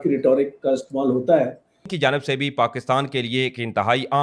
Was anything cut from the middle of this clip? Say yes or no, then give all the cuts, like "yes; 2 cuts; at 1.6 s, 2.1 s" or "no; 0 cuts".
yes; 1 cut; at 1.8 s